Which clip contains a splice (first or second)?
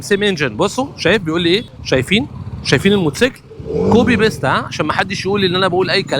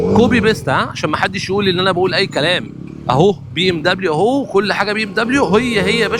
first